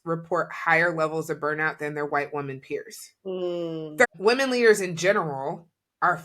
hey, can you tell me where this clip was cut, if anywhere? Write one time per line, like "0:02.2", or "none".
0:04.0